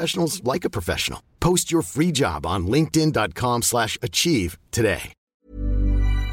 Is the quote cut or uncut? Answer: cut